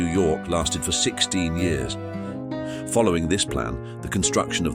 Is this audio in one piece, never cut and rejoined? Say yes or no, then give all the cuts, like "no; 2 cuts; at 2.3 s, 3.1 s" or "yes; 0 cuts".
no; 1 cut; at 2.3 s